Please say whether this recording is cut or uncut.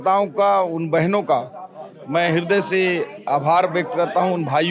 uncut